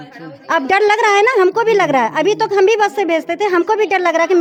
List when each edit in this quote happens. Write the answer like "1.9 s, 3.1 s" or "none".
none